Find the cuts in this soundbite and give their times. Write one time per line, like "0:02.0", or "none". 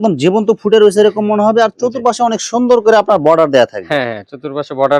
none